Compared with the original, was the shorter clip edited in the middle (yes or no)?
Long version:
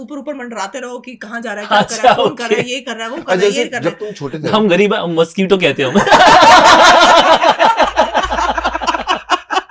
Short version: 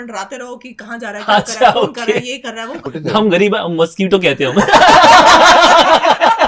yes